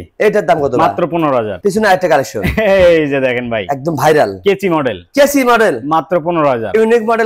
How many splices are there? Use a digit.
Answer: 0